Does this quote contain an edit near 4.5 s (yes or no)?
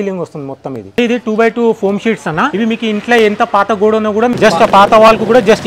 no